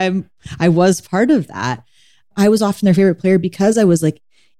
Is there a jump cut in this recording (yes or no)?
yes